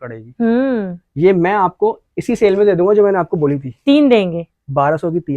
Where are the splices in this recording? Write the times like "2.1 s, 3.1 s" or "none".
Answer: none